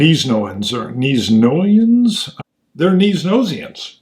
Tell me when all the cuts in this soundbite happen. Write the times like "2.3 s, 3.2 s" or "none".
2.3 s